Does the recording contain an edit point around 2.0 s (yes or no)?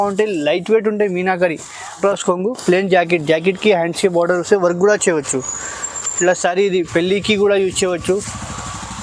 yes